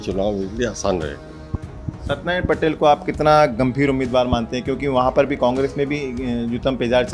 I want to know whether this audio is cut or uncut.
uncut